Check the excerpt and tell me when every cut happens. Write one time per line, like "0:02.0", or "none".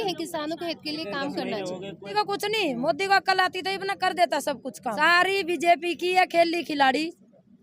0:02.1
0:05.0